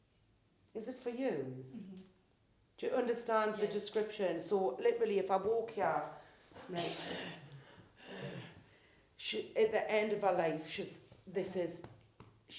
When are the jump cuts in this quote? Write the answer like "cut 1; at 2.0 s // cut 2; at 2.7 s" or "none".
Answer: none